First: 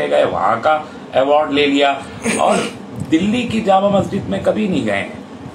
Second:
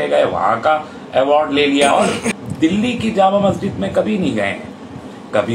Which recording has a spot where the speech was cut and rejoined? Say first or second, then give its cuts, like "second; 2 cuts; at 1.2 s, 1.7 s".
second; 1 cut; at 1.9 s